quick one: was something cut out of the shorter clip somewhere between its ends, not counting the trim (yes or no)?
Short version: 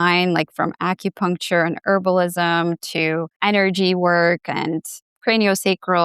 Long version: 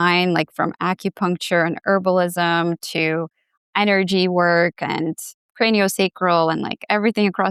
yes